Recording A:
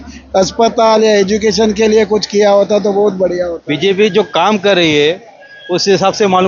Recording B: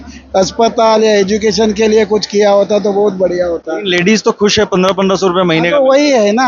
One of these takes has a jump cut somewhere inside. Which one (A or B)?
A